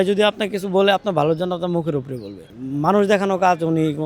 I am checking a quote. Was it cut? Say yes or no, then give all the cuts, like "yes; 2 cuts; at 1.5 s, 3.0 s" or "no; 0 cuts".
yes; 1 cut; at 2.5 s